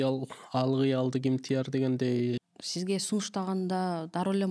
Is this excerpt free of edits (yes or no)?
no